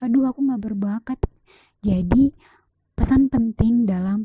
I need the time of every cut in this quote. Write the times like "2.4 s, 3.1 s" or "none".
1.2 s